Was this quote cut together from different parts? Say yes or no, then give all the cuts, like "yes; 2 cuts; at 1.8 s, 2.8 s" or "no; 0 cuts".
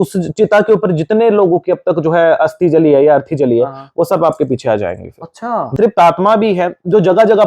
yes; 1 cut; at 5.7 s